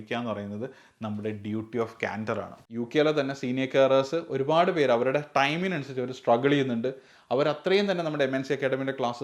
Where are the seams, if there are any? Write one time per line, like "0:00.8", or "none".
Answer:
0:02.6